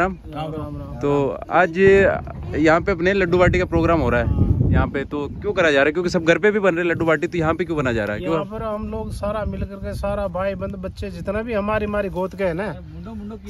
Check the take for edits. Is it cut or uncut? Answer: uncut